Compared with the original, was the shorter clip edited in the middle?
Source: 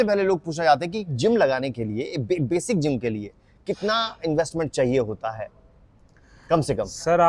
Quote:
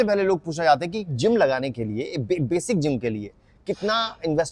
no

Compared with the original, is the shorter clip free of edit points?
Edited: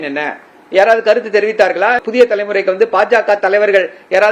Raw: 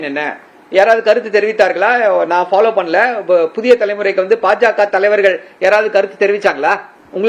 no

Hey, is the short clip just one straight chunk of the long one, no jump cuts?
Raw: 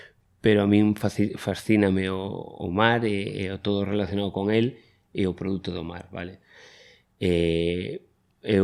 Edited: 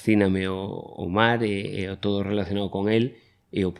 yes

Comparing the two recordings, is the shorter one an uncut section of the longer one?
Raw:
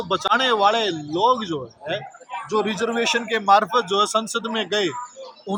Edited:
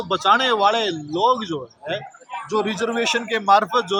yes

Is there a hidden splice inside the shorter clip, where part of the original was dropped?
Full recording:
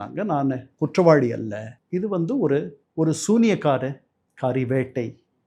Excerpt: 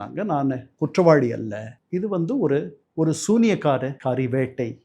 yes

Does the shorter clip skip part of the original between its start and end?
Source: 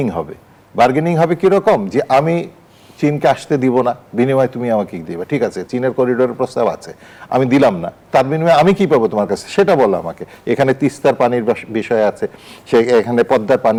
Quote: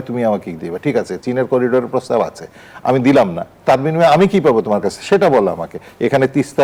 no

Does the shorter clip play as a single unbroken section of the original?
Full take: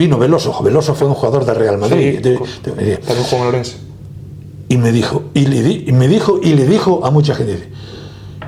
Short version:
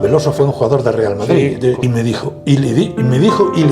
no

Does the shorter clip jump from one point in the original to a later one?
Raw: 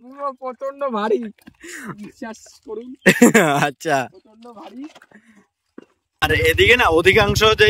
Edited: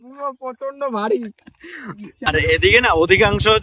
yes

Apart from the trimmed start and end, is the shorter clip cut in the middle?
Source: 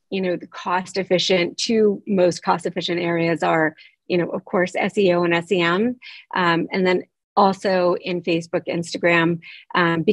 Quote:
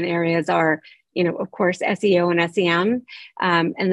no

